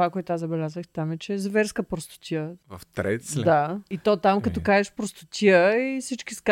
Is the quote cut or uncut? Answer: uncut